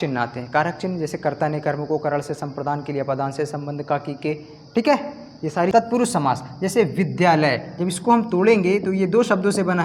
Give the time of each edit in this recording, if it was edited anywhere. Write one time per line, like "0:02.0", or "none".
0:05.7